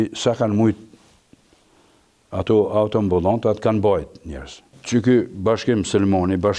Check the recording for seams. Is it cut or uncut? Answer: uncut